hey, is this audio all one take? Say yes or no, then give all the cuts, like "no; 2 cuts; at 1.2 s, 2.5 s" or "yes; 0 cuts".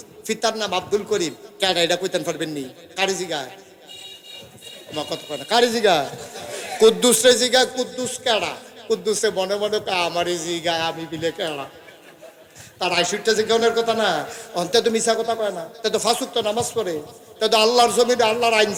yes; 0 cuts